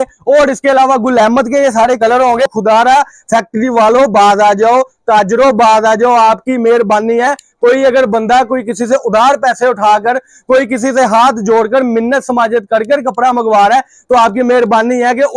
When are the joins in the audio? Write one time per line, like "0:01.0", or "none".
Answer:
0:02.5

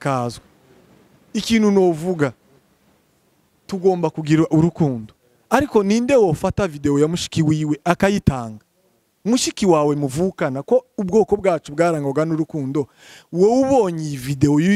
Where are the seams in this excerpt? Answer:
none

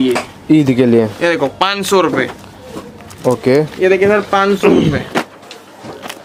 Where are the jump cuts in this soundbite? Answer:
none

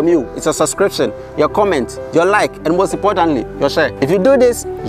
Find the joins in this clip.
none

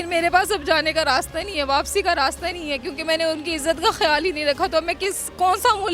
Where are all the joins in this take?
none

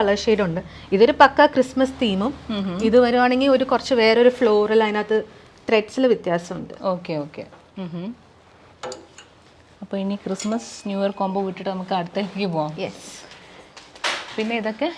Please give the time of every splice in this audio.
none

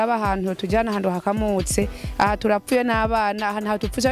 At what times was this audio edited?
none

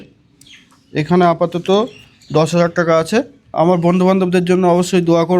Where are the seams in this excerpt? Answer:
0:03.4

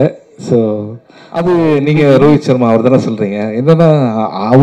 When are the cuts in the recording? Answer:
0:01.7

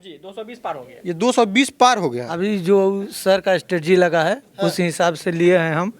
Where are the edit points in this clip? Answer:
0:02.4

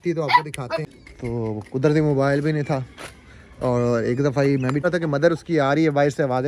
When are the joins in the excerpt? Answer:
0:01.0
0:04.8

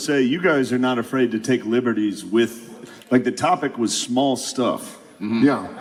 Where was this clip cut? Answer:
none

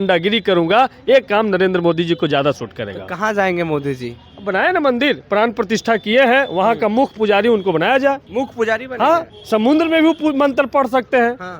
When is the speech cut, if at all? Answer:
0:08.2

